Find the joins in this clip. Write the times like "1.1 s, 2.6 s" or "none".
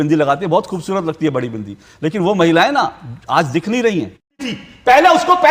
4.4 s